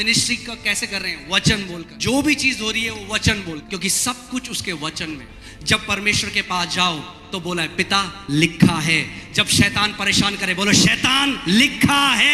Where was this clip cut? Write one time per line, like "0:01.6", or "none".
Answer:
0:01.9
0:03.6
0:05.3